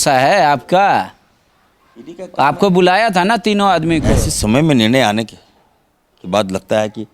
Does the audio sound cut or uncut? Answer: cut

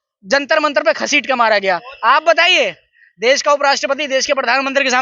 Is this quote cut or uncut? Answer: cut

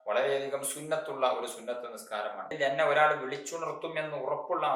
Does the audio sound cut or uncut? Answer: cut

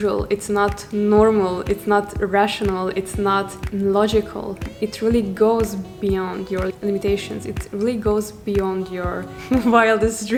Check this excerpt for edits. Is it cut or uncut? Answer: uncut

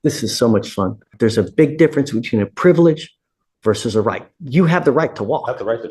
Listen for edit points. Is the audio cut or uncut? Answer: cut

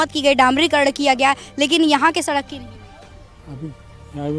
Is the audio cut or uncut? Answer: uncut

